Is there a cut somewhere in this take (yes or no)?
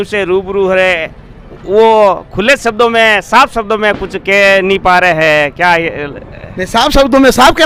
no